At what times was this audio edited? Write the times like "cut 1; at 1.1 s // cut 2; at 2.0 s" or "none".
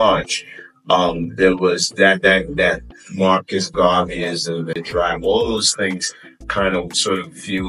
cut 1; at 4.8 s